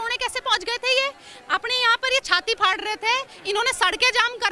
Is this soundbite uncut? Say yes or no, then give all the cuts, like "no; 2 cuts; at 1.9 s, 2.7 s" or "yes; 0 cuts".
yes; 0 cuts